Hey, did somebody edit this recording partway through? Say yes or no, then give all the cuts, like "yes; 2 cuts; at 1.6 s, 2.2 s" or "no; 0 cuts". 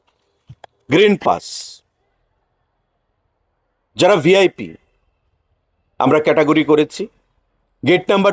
no; 0 cuts